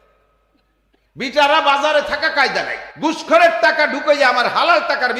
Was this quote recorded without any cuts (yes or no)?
no